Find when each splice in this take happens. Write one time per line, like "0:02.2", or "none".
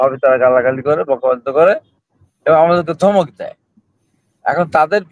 none